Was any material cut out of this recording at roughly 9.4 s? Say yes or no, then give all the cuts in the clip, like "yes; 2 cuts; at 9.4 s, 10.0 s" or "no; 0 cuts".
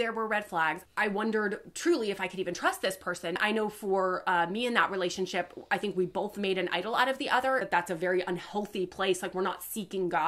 no; 3 cuts; at 0.9 s, 3.4 s, 7.7 s